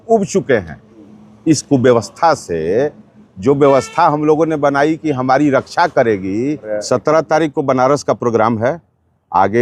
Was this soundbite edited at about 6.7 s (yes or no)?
yes